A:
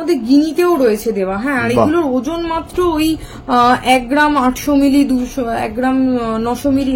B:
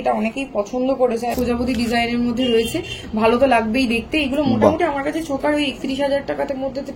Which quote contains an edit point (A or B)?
B